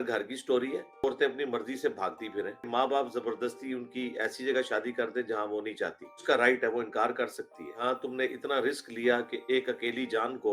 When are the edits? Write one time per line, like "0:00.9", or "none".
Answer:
0:01.0
0:02.7
0:06.2
0:07.7